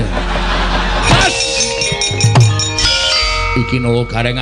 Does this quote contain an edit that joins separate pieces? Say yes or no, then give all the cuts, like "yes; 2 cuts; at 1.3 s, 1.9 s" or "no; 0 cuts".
yes; 2 cuts; at 1.1 s, 2.8 s